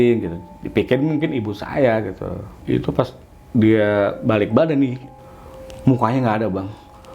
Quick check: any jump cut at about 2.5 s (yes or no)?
yes